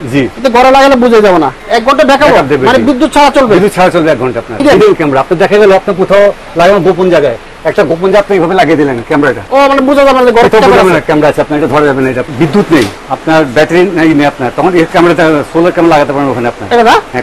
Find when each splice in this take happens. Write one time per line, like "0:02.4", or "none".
0:01.6
0:04.6
0:09.4
0:12.3
0:13.0